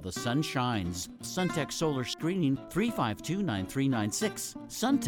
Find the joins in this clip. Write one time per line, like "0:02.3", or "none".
0:01.2
0:02.6